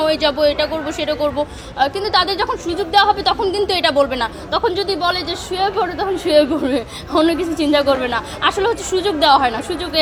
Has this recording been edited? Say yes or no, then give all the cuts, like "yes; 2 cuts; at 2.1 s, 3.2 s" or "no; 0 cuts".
no; 0 cuts